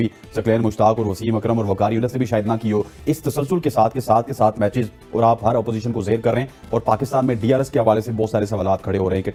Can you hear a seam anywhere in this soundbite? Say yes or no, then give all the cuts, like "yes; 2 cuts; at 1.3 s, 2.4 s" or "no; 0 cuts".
no; 0 cuts